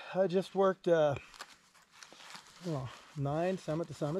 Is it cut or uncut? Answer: uncut